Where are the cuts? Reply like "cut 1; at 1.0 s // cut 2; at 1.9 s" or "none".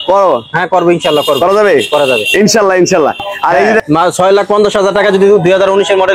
cut 1; at 3.8 s